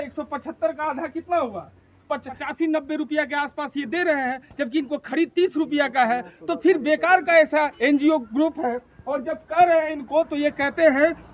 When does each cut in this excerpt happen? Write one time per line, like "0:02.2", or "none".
0:02.4